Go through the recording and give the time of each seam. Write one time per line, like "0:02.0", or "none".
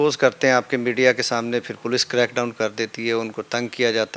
none